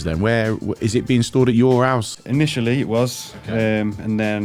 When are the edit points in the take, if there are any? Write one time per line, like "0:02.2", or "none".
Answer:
none